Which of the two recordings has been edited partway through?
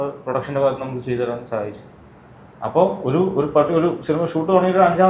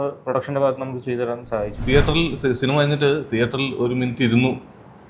second; 1 cut; at 1.8 s

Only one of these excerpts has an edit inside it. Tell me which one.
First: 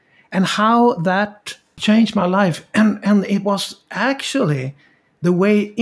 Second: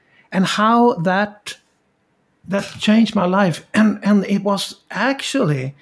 first; 1 cut; at 1.7 s

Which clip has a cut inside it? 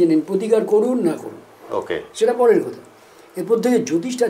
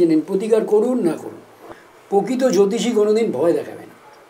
second; 1 cut; at 1.7 s

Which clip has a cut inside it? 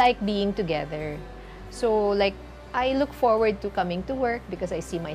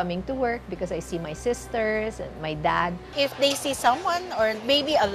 second; 1 cut; at 3.0 s

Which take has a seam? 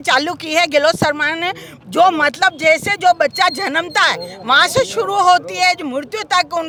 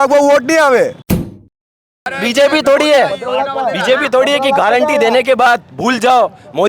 second; 1 cut; at 1.6 s

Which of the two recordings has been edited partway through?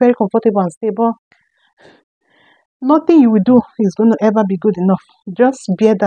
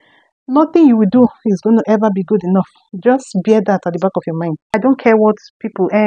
second; 1 cut; at 4.7 s

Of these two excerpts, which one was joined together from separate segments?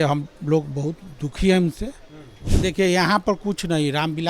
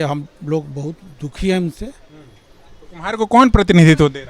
first; 1 cut; at 2.5 s

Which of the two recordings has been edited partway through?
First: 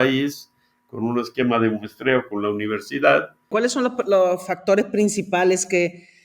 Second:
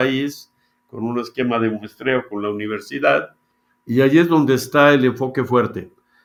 first; 1 cut; at 3.5 s

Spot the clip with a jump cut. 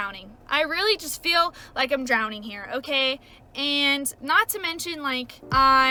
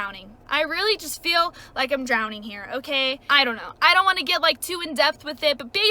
second; 1 cut; at 3.2 s

